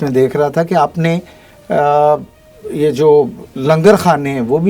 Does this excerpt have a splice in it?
yes; 1 cut; at 3.4 s

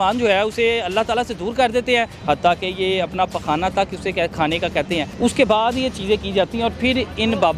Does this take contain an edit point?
yes; 2 cuts; at 2.2 s, 5.1 s

